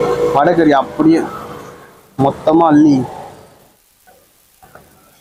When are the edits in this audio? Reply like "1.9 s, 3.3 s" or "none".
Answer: 3.8 s